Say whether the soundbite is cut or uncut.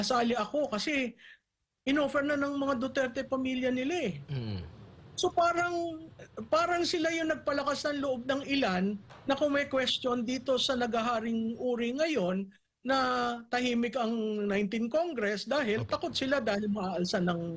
uncut